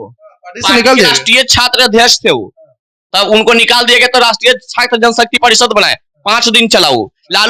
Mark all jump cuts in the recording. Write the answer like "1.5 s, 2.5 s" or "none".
none

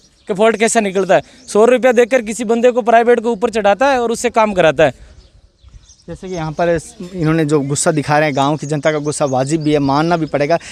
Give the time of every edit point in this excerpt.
none

